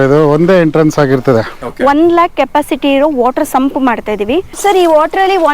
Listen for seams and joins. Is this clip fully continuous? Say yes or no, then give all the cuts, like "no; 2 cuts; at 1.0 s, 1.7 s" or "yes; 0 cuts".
no; 2 cuts; at 1.5 s, 4.5 s